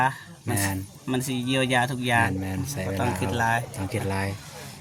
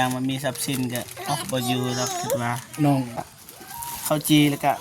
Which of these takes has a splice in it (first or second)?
second